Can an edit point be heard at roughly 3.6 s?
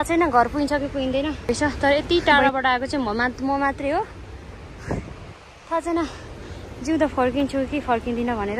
no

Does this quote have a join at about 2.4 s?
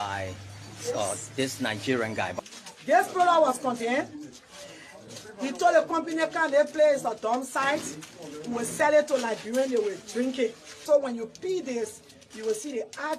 yes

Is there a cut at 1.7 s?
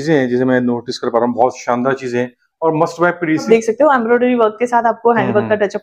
no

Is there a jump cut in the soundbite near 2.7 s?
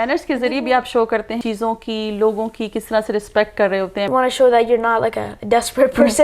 no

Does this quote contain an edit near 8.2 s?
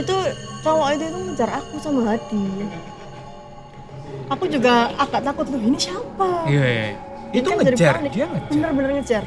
no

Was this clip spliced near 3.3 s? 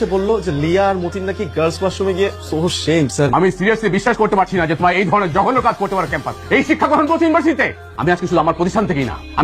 yes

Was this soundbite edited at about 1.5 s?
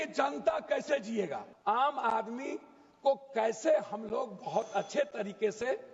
yes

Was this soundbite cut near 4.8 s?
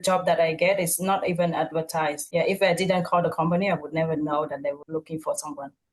yes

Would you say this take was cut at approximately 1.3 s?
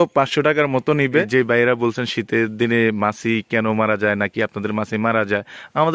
yes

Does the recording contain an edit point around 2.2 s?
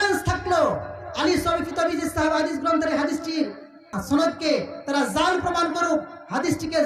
no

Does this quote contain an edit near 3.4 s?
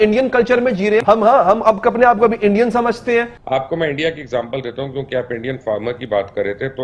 yes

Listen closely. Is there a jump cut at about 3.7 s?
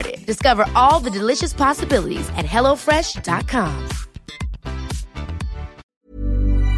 no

